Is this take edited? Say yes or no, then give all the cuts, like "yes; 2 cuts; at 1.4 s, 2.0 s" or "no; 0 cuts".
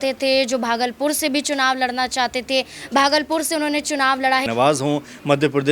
yes; 1 cut; at 4.5 s